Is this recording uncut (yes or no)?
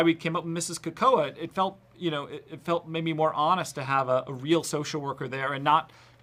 yes